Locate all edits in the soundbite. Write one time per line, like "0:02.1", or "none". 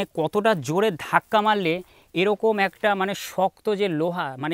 none